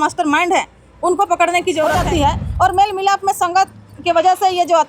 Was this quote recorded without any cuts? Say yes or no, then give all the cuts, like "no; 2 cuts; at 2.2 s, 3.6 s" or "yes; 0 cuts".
no; 1 cut; at 2.0 s